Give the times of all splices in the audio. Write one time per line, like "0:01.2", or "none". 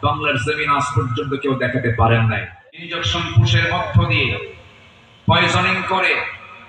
0:02.5